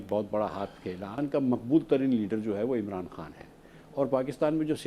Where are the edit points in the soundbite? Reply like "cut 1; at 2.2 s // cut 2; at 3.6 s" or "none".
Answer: cut 1; at 1.2 s